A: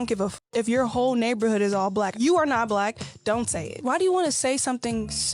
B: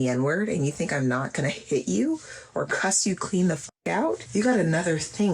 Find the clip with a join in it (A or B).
B